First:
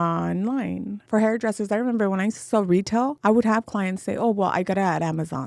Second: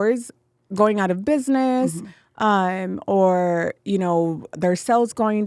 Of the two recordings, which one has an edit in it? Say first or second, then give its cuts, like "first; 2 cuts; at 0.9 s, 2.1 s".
first; 2 cuts; at 1.0 s, 3.1 s